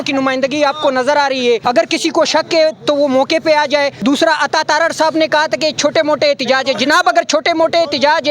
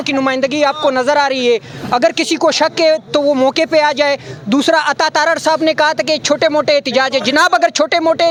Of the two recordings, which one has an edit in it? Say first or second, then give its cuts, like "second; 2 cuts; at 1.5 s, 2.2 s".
first; 2 cuts; at 1.6 s, 4.0 s